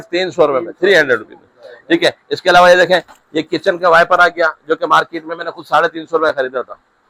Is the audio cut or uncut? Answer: uncut